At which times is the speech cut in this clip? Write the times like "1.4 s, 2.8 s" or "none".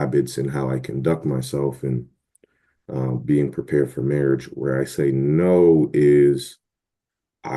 none